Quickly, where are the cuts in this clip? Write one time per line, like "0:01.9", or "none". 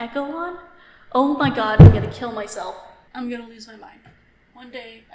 0:02.9